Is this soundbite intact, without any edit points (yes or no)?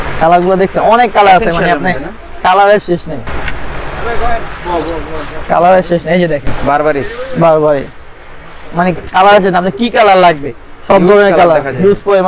yes